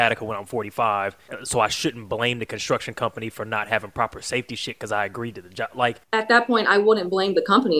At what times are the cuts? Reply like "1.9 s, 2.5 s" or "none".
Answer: 1.3 s, 6.1 s

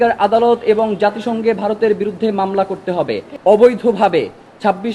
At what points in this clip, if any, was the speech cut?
3.2 s

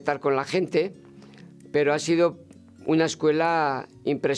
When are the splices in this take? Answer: none

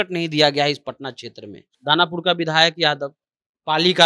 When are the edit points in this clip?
1.7 s

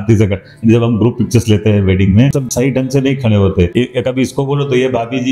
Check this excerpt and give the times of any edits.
2.4 s, 3.7 s

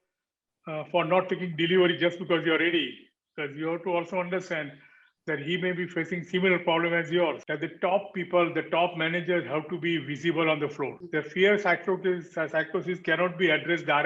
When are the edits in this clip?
7.5 s, 11.0 s

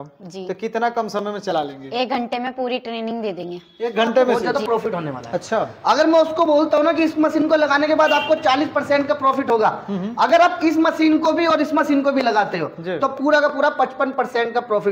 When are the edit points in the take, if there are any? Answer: 4.4 s

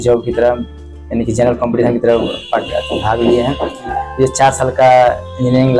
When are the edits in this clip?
4.0 s

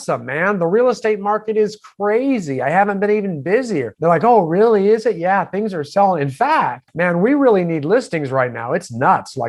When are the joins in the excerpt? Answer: 3.9 s, 6.8 s

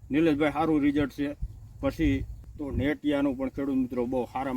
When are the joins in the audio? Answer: 2.4 s

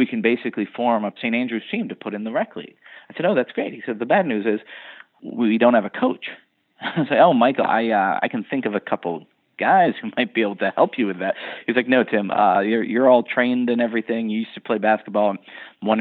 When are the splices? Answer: 1.2 s, 5.2 s

